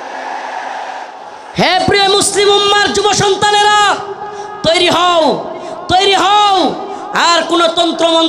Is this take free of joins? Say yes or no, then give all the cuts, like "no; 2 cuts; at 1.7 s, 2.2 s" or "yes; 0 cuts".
no; 1 cut; at 1.1 s